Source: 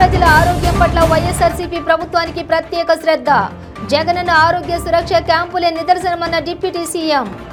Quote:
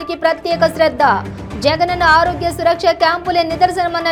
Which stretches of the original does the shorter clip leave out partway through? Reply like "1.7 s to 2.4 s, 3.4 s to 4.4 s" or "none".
none

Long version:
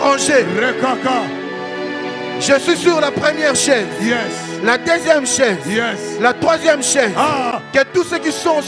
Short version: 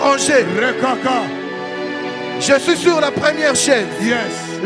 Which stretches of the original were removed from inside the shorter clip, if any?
none

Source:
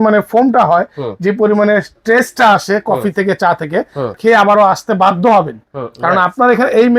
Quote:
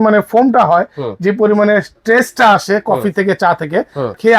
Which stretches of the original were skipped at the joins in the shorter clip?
none

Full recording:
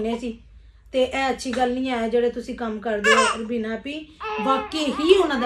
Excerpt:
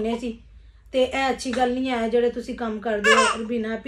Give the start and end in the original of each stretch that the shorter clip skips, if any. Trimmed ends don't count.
none

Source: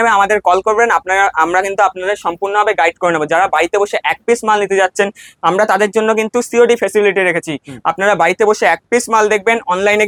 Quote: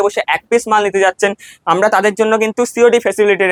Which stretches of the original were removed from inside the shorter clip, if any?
none

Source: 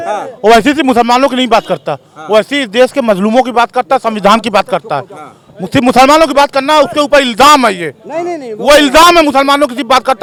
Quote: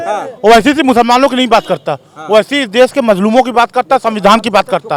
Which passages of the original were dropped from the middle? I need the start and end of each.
none

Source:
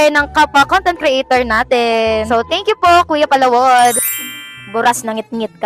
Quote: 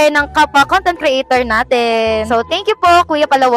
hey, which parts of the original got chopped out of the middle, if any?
none

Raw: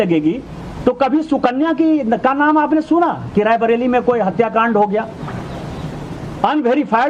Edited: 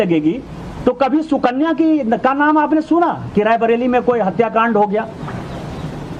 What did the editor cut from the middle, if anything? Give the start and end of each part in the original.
none

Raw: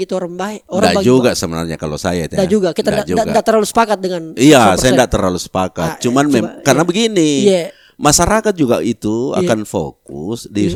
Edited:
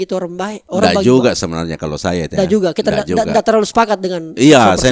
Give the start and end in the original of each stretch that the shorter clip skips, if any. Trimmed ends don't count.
none

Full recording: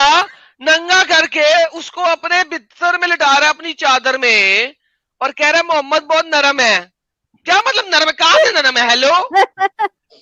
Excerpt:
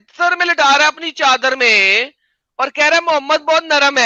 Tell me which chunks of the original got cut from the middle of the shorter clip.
none

